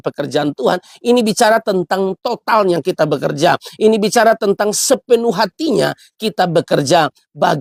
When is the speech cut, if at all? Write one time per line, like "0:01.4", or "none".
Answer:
none